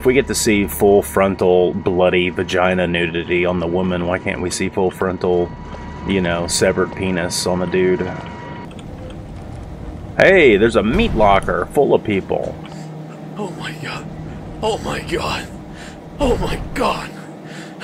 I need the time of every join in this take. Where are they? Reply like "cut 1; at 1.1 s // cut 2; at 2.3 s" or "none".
cut 1; at 8.6 s